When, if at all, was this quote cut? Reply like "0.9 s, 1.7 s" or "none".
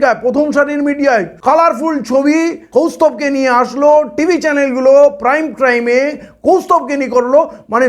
1.3 s, 2.6 s